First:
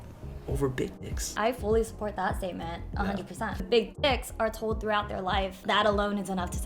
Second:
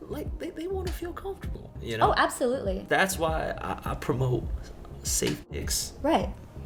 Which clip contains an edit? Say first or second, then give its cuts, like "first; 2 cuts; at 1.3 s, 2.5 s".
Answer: first; 3 cuts; at 1.3 s, 3.7 s, 5.6 s